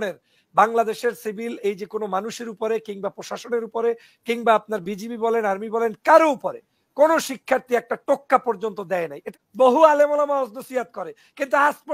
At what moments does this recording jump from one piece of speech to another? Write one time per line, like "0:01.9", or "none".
0:09.2